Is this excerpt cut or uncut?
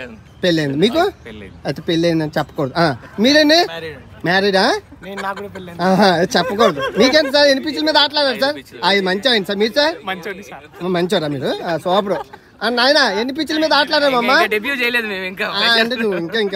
uncut